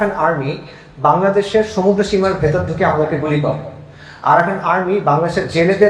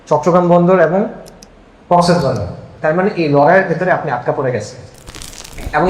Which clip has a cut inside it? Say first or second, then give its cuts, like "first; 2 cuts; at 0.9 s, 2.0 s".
second; 1 cut; at 2.6 s